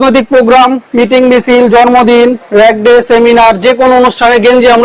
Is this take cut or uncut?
uncut